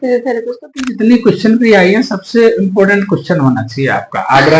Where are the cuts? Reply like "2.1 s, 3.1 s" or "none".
0.9 s